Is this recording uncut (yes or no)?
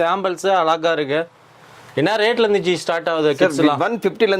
yes